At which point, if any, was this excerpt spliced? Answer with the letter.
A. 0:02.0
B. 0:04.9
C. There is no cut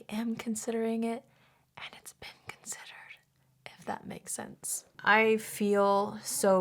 B